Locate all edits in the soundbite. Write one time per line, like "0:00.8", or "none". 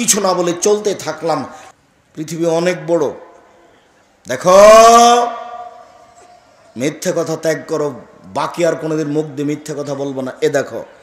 0:01.6